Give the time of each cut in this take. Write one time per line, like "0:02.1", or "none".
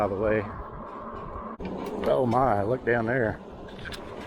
0:01.6